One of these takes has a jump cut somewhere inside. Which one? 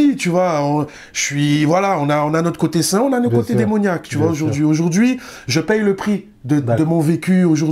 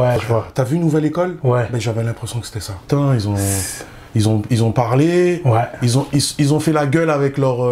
second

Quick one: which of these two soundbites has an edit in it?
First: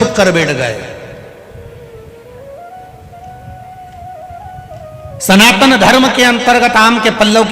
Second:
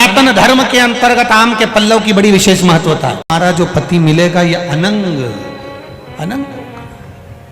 second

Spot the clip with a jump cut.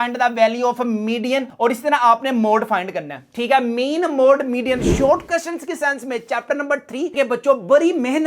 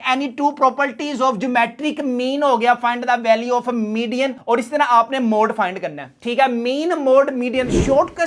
first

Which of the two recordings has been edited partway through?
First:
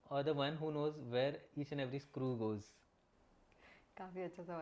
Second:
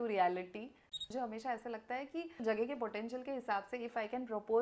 second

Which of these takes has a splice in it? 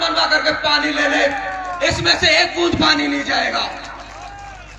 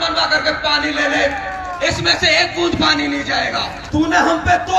second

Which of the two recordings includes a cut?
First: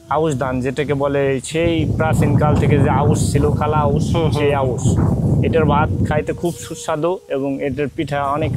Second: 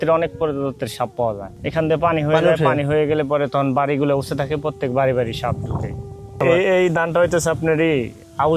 second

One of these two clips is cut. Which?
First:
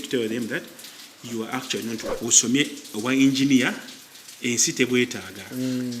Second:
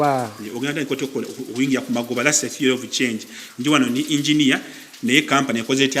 first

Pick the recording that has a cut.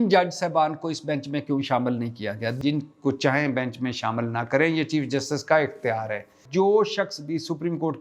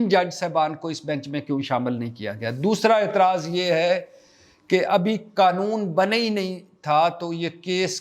first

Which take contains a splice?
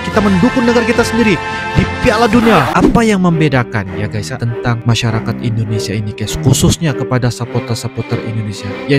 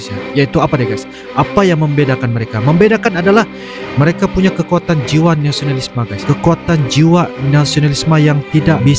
first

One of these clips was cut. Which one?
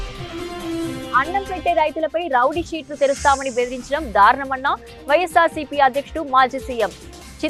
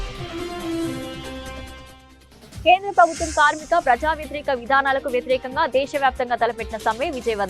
second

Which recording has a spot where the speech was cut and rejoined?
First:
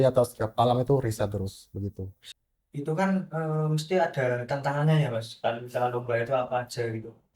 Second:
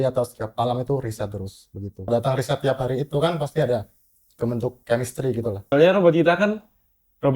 second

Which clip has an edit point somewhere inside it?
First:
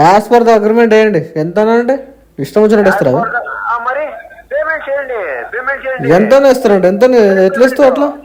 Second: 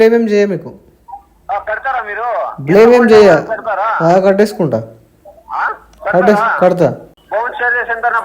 second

